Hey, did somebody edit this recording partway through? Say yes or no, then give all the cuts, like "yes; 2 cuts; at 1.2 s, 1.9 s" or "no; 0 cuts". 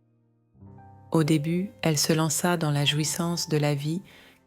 yes; 1 cut; at 1.1 s